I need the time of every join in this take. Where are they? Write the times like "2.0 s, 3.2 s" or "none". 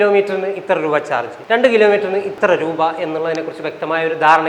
none